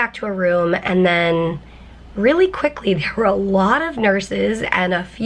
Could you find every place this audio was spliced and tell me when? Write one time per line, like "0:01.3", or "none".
none